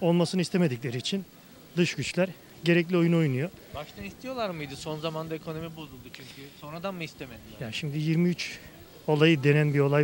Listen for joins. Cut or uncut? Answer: uncut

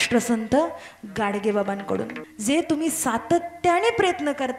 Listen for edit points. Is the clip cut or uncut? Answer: cut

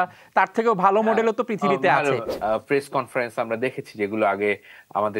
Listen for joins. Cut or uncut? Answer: cut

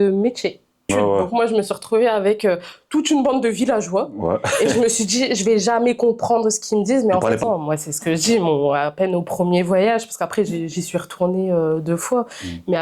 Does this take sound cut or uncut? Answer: cut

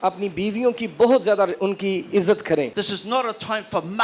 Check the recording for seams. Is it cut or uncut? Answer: cut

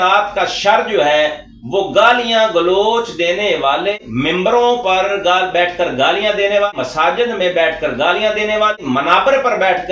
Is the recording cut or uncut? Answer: cut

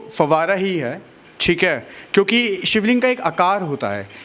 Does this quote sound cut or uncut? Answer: uncut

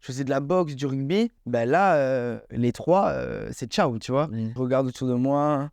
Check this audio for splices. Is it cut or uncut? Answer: cut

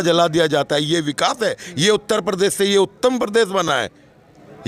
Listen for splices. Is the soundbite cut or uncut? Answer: uncut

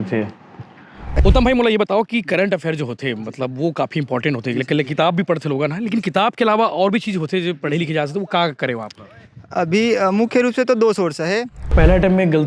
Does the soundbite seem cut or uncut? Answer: cut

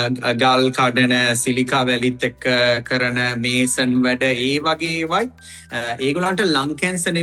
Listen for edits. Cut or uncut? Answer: uncut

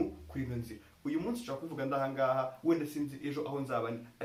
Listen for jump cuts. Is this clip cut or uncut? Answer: uncut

